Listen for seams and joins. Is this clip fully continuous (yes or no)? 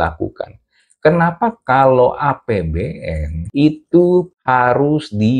no